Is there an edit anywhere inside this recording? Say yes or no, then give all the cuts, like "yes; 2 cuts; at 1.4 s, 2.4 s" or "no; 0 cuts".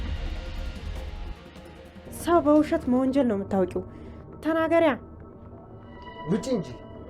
yes; 1 cut; at 2.1 s